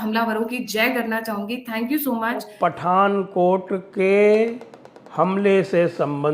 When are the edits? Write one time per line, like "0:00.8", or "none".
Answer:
0:02.4